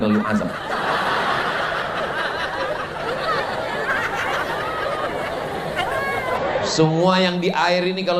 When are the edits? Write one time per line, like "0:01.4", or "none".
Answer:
0:06.4